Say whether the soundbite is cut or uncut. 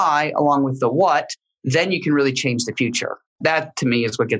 cut